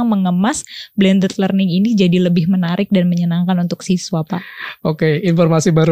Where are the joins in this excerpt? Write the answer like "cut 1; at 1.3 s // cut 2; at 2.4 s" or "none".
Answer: none